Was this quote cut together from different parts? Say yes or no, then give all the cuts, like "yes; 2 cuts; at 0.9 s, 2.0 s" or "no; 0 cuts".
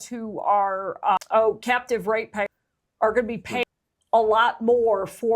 yes; 3 cuts; at 1.2 s, 2.5 s, 3.7 s